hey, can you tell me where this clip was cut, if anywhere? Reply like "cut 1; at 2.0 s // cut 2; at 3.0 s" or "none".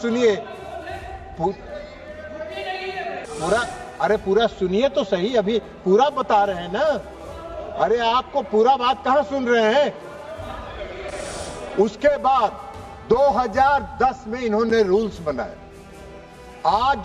cut 1; at 3.2 s